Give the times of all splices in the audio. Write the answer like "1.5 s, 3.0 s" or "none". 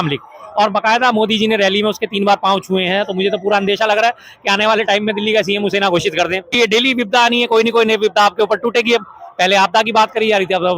6.5 s